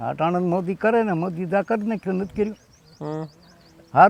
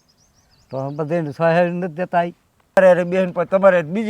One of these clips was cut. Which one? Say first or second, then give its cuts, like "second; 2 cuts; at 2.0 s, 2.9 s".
second; 1 cut; at 2.8 s